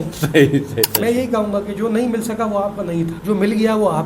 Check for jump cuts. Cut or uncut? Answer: cut